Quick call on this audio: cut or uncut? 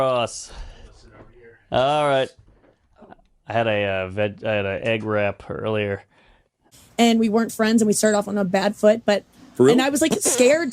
cut